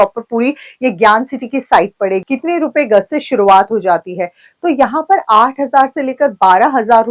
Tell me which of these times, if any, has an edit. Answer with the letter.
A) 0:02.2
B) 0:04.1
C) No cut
A